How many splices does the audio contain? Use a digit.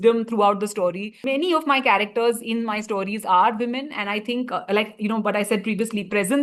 1